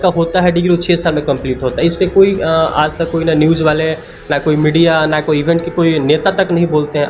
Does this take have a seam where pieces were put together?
no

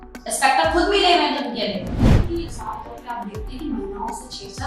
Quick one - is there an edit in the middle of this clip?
yes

